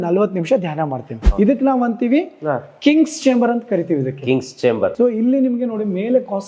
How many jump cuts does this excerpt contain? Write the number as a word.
two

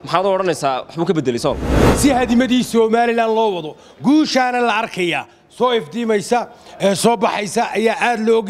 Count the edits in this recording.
one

